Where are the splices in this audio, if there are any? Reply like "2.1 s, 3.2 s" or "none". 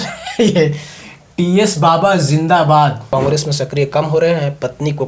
3.0 s